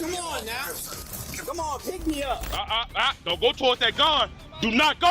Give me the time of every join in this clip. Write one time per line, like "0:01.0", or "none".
0:02.5